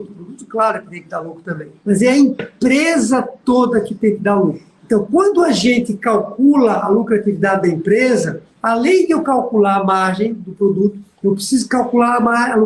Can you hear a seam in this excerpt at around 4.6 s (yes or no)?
no